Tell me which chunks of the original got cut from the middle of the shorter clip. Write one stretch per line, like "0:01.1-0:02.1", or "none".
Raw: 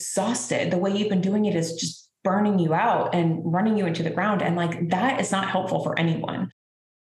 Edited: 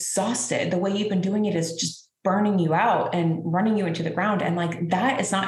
none